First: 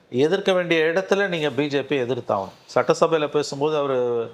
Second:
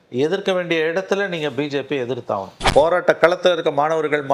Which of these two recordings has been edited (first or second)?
second